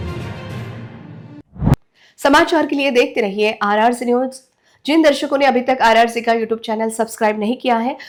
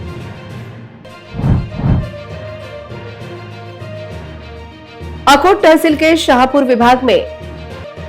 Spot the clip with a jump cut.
second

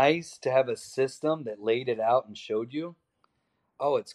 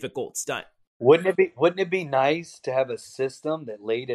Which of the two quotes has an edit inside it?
second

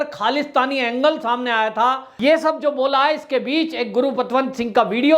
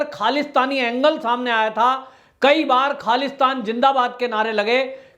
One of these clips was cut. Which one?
first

